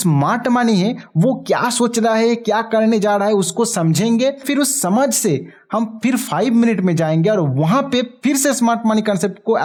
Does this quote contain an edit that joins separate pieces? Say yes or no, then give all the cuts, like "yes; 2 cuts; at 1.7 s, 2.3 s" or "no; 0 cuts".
no; 0 cuts